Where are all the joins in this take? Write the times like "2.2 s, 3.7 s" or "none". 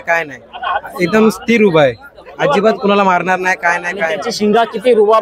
4.2 s